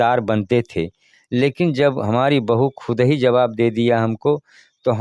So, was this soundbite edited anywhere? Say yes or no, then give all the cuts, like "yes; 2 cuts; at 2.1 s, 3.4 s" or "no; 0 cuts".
no; 0 cuts